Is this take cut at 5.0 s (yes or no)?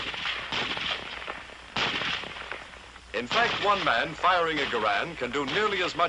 no